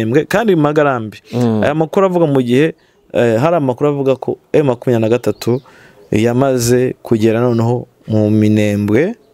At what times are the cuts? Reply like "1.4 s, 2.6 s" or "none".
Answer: none